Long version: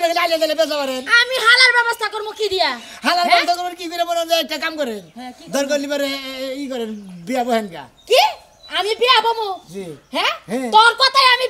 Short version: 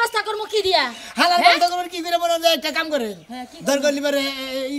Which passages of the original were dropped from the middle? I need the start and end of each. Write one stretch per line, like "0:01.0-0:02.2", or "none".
none